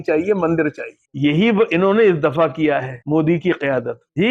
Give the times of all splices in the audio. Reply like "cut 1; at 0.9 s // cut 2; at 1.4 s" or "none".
none